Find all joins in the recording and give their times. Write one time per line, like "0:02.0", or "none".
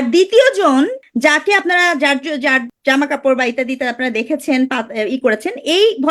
0:01.0
0:02.7